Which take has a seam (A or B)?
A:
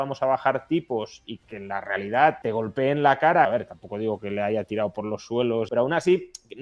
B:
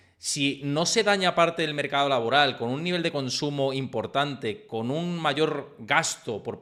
A